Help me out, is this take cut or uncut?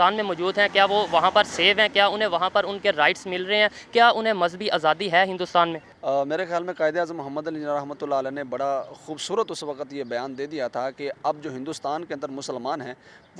cut